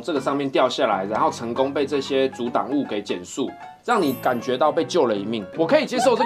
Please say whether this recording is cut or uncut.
uncut